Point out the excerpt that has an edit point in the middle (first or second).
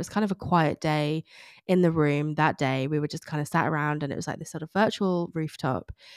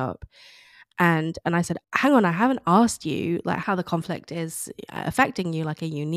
second